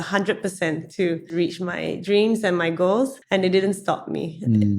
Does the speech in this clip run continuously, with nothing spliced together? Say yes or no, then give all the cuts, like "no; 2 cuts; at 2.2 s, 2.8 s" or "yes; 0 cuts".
no; 2 cuts; at 1.3 s, 3.2 s